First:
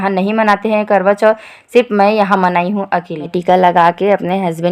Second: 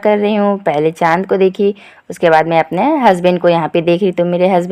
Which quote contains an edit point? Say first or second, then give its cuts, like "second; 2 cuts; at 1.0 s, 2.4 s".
first; 1 cut; at 3.3 s